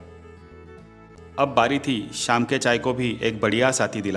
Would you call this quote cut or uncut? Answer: cut